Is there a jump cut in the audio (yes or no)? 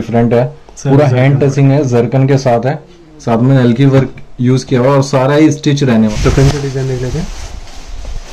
yes